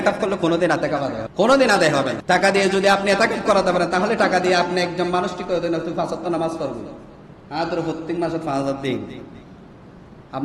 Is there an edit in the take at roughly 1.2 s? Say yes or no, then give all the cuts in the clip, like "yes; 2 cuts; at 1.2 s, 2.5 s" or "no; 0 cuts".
yes; 2 cuts; at 1.2 s, 2.2 s